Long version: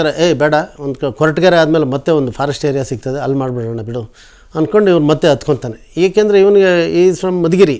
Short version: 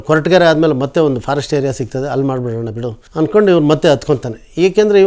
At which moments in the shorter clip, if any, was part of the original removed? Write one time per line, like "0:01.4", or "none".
0:03.0